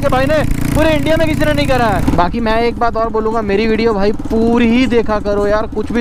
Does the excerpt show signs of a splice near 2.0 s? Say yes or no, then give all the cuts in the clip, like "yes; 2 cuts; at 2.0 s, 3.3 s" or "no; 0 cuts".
yes; 1 cut; at 2.0 s